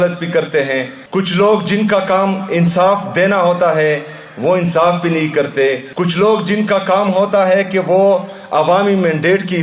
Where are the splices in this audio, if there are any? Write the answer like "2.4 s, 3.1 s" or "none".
1.0 s, 5.9 s